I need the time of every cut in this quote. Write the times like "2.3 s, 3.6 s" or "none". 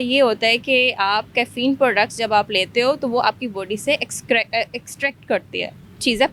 none